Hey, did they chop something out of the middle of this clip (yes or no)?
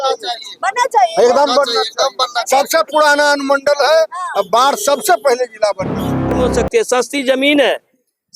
yes